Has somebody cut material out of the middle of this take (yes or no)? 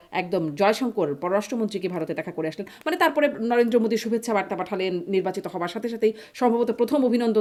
no